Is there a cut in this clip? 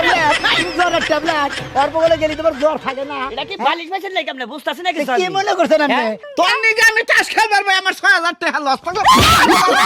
yes; 1 cut; at 6.1 s

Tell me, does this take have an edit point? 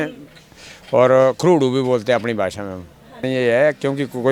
yes; 1 cut; at 3.2 s

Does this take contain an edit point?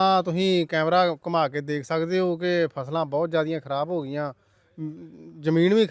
no; 0 cuts

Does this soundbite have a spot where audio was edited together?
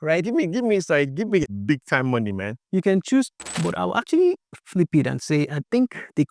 yes; 1 cut; at 3.4 s

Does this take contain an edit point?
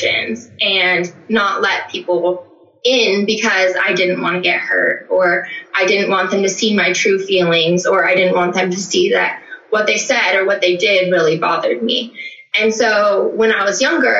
no; 0 cuts

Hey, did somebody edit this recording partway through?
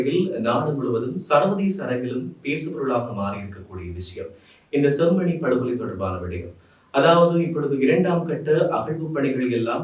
no; 0 cuts

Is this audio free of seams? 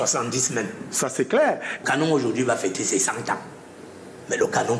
no; 1 cut; at 1.8 s

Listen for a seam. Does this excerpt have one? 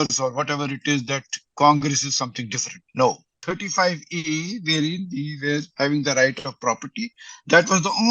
yes; 1 cut; at 3.4 s

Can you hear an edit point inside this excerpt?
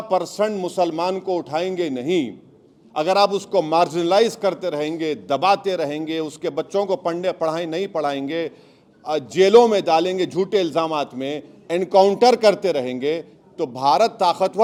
no; 0 cuts

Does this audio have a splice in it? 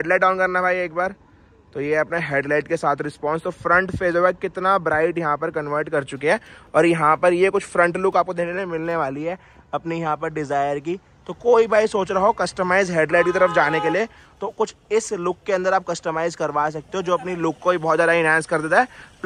no; 0 cuts

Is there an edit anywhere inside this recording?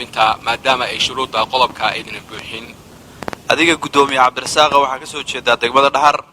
yes; 1 cut; at 2.9 s

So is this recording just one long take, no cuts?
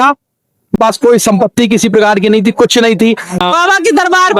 no; 2 cuts; at 0.8 s, 3.4 s

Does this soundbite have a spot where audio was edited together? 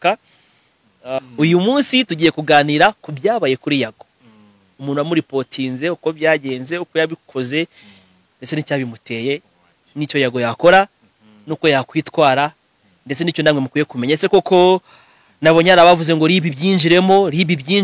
yes; 1 cut; at 1.1 s

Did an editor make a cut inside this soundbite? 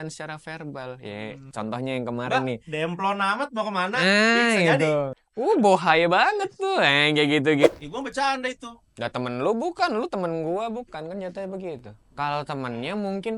yes; 2 cuts; at 5.2 s, 7.7 s

